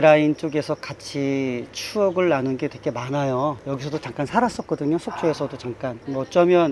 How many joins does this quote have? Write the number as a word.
zero